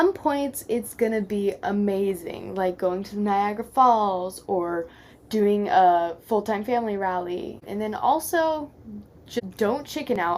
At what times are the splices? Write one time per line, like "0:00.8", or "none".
0:07.6
0:09.4